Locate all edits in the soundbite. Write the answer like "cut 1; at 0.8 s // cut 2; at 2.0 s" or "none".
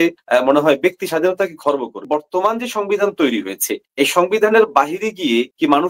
cut 1; at 2.1 s